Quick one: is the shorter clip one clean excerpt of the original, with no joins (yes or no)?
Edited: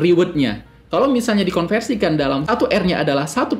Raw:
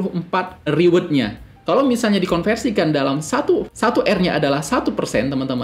no